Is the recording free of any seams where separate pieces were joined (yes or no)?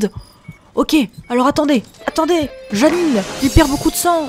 no